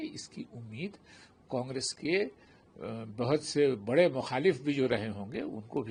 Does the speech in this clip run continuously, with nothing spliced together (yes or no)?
yes